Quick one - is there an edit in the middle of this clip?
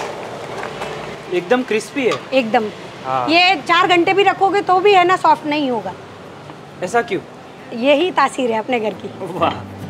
no; 0 cuts

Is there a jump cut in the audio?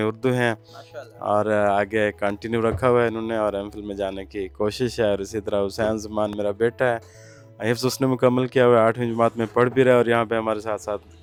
no; 0 cuts

